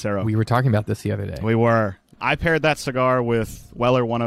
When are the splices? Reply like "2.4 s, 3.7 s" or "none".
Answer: 2.0 s